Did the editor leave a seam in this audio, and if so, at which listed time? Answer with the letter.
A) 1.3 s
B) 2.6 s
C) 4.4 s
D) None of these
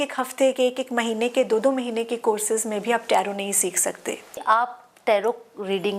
C